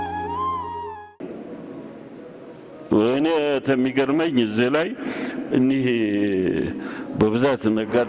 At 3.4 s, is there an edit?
no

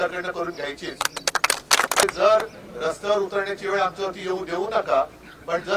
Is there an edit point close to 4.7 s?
no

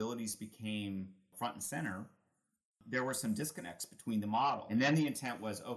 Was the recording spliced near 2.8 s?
yes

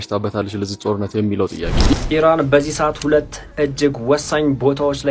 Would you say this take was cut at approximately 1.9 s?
yes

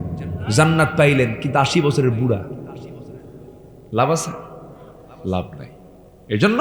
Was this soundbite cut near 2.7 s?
no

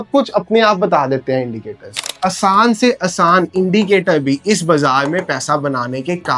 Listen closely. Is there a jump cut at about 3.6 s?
no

